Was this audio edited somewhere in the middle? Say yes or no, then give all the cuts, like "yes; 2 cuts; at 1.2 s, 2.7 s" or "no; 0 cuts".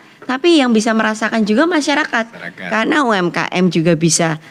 no; 0 cuts